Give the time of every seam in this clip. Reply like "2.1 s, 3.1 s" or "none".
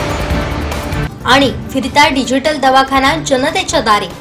none